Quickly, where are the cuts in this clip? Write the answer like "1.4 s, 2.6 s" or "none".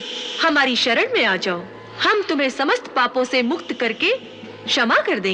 none